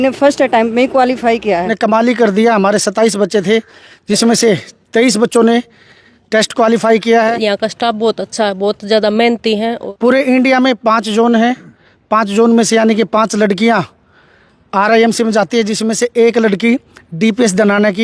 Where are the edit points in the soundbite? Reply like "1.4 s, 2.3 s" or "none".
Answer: 1.7 s, 7.4 s, 9.8 s